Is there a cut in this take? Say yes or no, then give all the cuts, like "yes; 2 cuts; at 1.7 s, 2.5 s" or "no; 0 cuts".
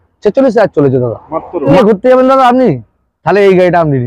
yes; 1 cut; at 1.7 s